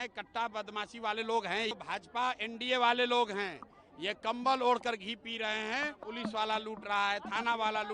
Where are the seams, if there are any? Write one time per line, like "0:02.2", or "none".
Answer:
0:01.8
0:06.0

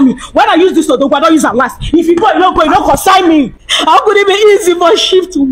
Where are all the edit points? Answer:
0:03.6

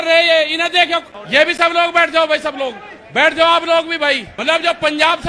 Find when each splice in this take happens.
0:04.3

